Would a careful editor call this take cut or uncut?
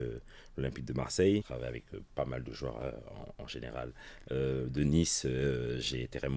uncut